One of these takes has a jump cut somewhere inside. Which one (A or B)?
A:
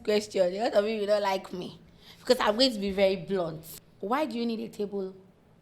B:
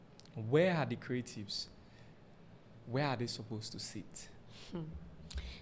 A